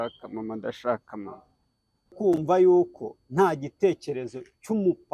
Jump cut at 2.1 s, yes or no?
yes